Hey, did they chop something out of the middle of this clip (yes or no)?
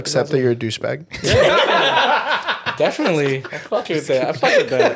no